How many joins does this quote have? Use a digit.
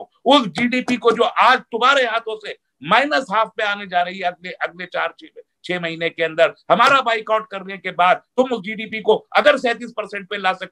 0